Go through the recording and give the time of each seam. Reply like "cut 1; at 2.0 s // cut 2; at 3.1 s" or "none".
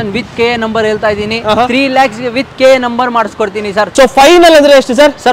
cut 1; at 3.8 s